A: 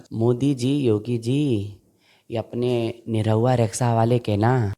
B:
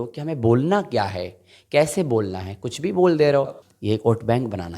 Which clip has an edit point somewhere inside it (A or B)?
B